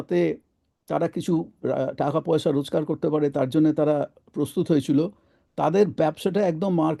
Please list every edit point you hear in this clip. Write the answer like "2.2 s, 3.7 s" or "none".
none